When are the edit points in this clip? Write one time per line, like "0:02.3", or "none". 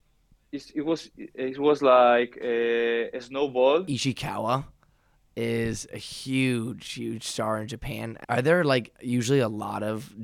0:03.9
0:08.1